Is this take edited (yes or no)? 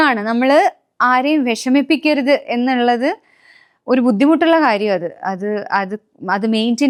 no